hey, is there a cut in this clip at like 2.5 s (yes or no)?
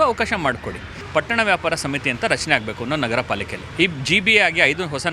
no